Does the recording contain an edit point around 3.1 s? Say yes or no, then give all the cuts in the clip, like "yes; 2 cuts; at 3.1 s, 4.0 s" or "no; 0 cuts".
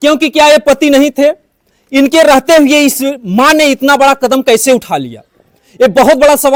no; 0 cuts